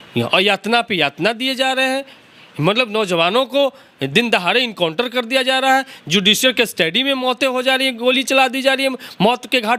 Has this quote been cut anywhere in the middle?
no; 0 cuts

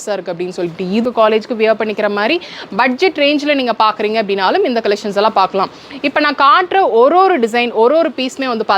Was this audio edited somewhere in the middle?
yes; 1 cut; at 1.0 s

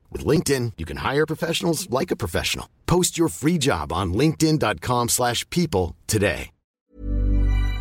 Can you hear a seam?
yes; 1 cut; at 6.7 s

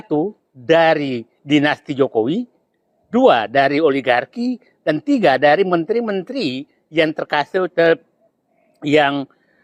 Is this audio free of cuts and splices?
yes; 0 cuts

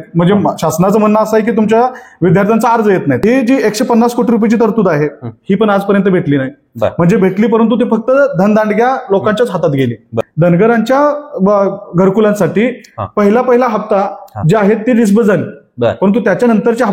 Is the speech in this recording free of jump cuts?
no; 2 cuts; at 3.2 s, 10.1 s

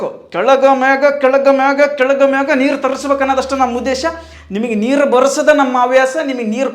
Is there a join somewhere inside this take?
no; 0 cuts

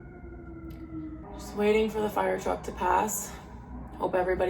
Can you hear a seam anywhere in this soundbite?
yes; 1 cut; at 1.2 s

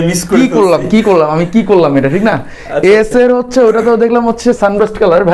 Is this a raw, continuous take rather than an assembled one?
yes; 0 cuts

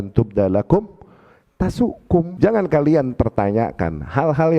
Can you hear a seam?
yes; 1 cut; at 2.3 s

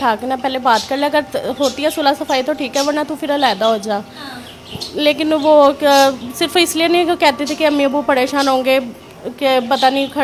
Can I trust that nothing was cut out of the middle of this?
yes; 0 cuts

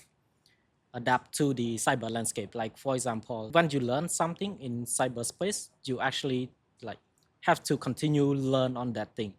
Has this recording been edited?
yes; 1 cut; at 3.4 s

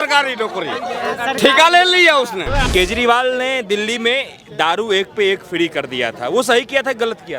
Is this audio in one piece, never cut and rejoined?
no; 1 cut; at 2.6 s

